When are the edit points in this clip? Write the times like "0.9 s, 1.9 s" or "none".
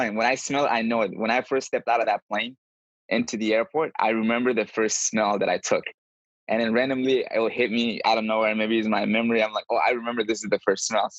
none

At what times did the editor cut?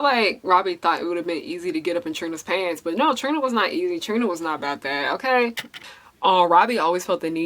5.8 s

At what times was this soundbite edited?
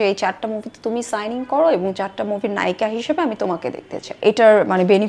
4.2 s

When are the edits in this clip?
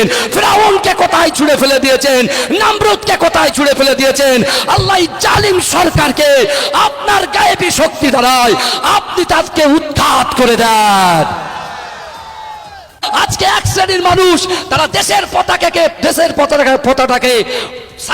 13.1 s

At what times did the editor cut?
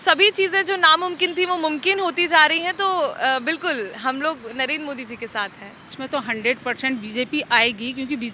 5.9 s

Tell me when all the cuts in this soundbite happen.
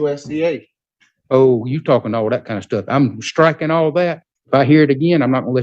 4.3 s

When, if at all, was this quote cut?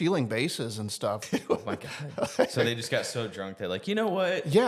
1.2 s

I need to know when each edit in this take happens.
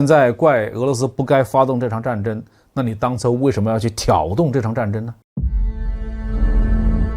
5.2 s

